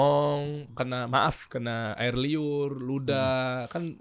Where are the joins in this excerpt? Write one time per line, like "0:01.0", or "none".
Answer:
none